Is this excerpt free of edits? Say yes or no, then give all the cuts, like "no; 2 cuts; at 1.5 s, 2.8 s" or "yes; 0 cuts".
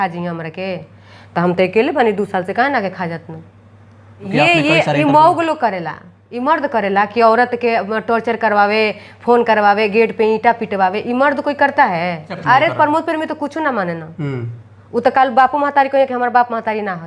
no; 2 cuts; at 4.3 s, 12.3 s